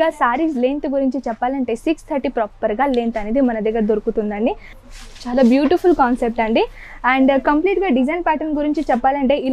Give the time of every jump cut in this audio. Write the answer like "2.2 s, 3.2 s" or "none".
4.7 s